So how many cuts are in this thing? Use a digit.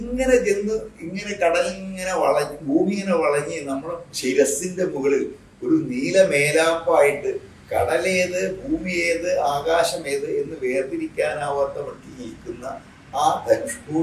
0